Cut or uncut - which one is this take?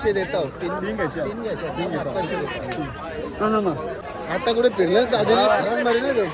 cut